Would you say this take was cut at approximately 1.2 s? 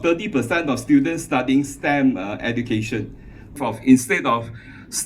no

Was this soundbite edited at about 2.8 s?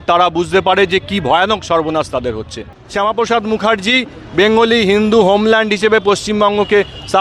yes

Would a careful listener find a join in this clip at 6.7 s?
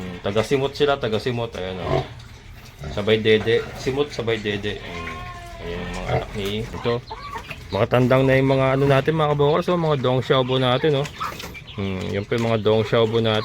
yes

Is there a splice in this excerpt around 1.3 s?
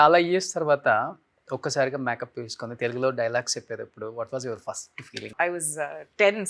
no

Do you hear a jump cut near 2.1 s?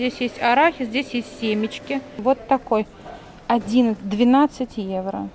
yes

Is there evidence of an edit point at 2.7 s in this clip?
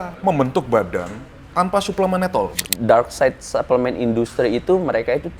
yes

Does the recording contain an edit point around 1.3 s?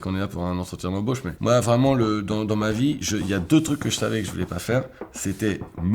yes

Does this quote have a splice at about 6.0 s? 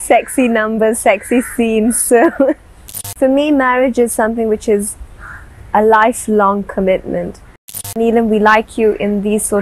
no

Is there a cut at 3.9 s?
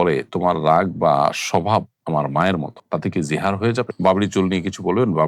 yes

